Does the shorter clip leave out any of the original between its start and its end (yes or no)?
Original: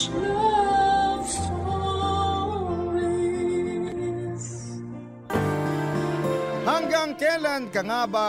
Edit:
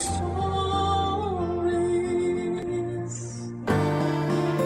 yes